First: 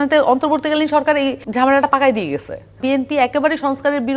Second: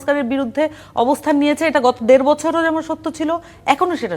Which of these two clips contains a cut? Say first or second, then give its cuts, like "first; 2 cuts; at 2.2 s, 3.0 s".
first; 2 cuts; at 1.4 s, 2.8 s